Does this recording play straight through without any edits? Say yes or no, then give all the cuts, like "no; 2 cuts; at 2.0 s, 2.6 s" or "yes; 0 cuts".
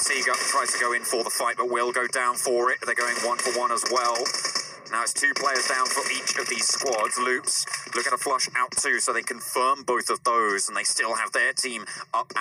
yes; 0 cuts